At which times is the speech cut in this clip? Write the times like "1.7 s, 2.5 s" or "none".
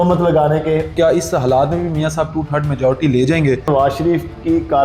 0.9 s, 3.7 s